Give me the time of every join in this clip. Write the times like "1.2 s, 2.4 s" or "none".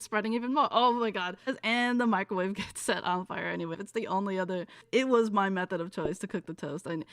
1.5 s, 3.8 s, 4.8 s